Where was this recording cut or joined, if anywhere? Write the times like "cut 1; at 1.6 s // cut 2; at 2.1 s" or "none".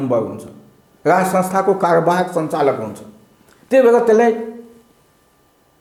none